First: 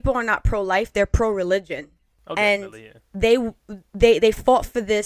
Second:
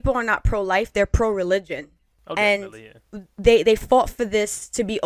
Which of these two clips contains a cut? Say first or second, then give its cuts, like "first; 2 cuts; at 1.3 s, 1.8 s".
second; 1 cut; at 3.0 s